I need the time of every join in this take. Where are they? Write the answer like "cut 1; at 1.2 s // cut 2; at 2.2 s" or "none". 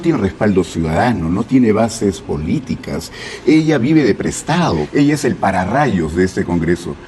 cut 1; at 4.8 s

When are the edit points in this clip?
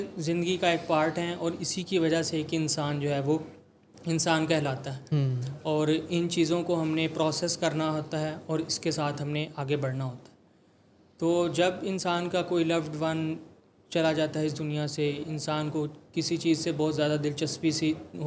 none

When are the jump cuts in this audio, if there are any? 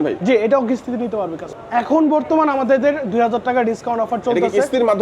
cut 1; at 1.5 s

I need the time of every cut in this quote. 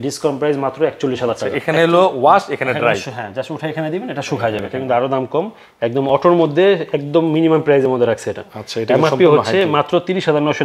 cut 1; at 1.5 s // cut 2; at 4.7 s

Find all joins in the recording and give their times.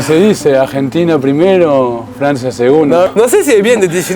cut 1; at 3.1 s

